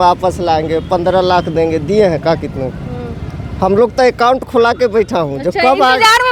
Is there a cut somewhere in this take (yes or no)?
no